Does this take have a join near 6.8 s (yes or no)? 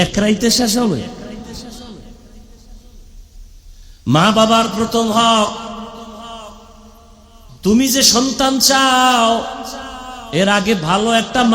no